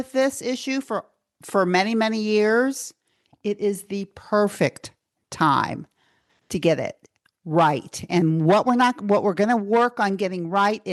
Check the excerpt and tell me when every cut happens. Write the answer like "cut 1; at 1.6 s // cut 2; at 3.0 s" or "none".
none